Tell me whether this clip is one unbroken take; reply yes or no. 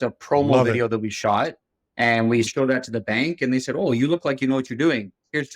no